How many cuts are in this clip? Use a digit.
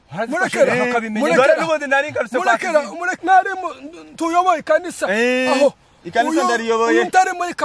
1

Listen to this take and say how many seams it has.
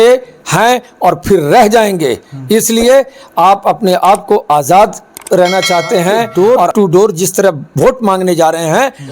1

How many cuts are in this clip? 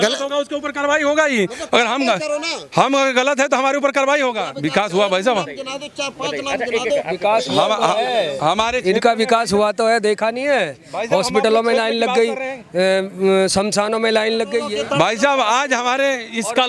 2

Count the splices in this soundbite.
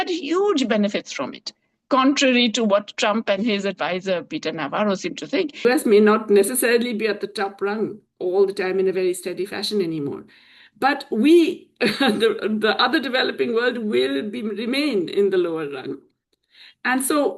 1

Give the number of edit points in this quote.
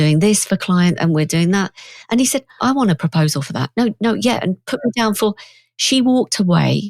1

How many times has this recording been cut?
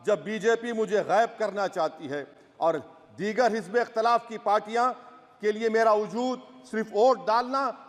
0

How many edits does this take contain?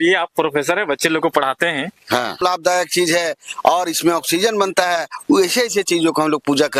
1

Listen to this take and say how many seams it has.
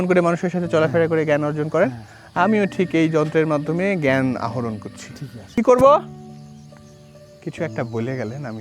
3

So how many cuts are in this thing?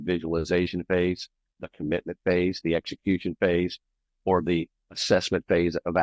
0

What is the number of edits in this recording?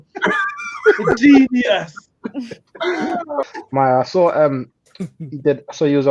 1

